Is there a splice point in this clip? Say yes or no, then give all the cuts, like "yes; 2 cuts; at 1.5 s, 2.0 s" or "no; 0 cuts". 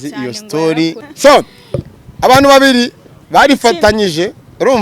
yes; 1 cut; at 1.0 s